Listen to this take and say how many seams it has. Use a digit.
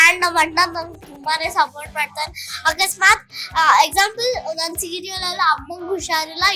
0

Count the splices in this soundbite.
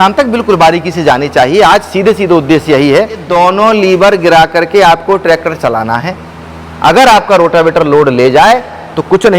1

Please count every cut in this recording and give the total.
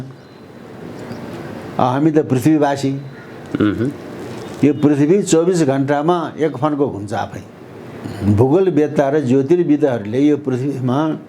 1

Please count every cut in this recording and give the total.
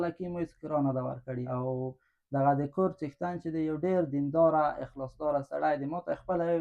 1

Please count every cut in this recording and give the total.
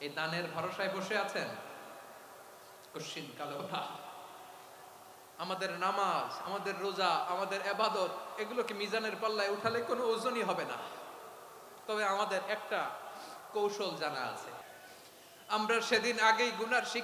1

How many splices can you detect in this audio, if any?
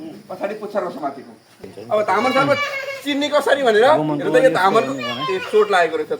1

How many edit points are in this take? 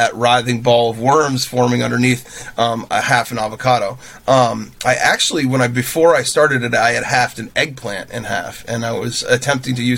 0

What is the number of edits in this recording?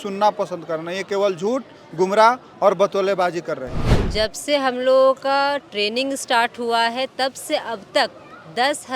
1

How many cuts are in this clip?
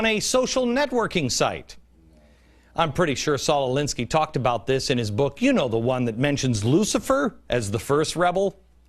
1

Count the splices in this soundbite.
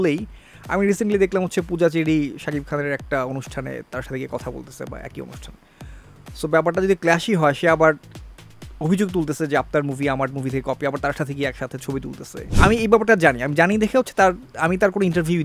1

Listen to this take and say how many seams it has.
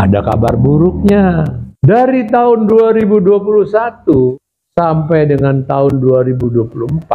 2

